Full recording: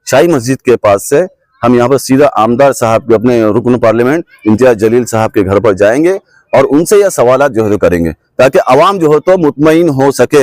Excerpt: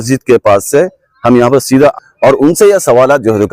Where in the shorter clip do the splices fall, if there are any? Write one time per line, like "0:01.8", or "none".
0:02.0

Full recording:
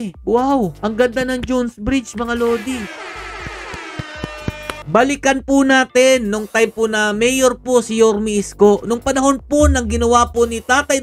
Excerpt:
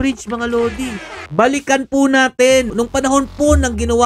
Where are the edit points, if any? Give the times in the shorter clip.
0:01.2
0:02.7

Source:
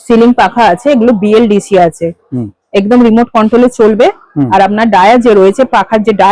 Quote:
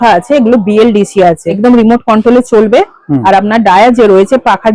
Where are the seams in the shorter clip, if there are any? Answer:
0:01.5

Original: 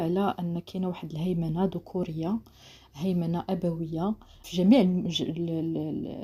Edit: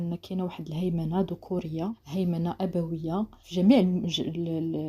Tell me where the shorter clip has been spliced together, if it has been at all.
0:02.0
0:03.4

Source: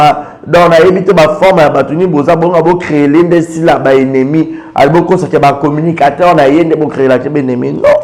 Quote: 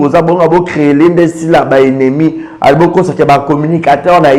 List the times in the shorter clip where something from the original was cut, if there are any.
none

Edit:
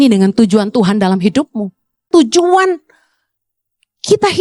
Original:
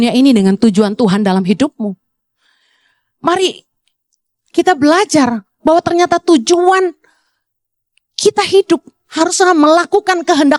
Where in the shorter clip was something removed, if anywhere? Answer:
0:02.1

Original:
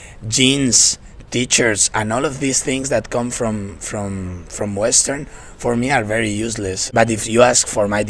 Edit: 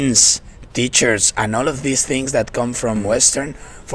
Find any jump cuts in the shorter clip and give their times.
0:03.0

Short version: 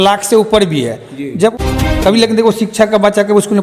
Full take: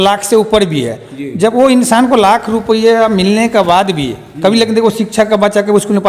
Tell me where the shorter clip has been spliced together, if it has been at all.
0:01.5

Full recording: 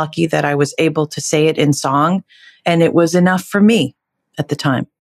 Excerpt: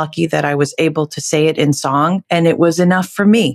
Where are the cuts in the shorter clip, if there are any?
0:02.2

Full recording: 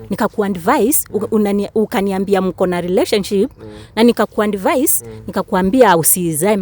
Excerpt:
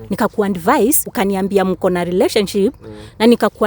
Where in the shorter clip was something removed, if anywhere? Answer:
0:01.1

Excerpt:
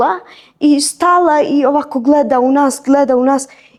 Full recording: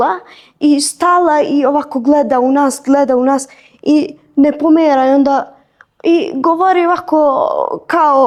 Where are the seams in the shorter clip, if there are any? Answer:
none

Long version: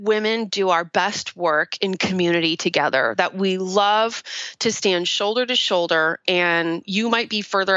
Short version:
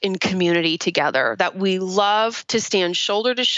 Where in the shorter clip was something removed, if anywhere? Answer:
0:02.4

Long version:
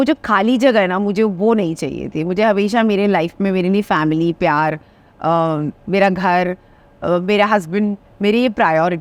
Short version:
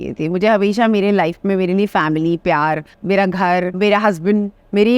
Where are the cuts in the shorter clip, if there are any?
0:02.9
0:03.8

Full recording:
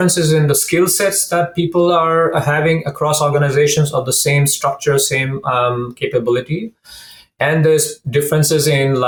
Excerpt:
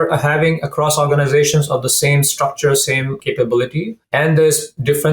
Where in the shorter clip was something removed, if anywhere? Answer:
0:03.2
0:04.0

